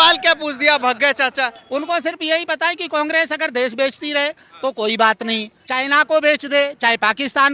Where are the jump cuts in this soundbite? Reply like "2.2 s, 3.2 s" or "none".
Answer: 1.6 s